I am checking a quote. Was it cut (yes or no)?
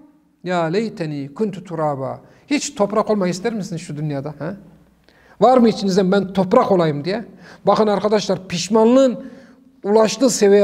no